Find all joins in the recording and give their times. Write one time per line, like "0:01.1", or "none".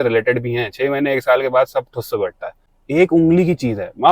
0:02.5